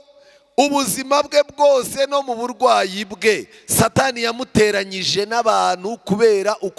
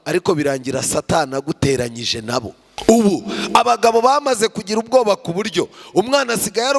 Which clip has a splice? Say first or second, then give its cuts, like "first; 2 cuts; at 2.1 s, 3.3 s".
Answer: second; 1 cut; at 2.6 s